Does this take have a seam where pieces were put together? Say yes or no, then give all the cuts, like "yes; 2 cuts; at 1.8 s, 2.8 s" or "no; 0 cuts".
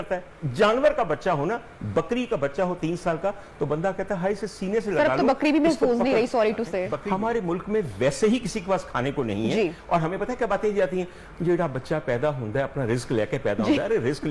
yes; 1 cut; at 7.0 s